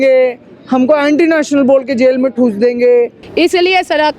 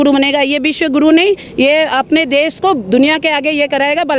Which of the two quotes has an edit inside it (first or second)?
first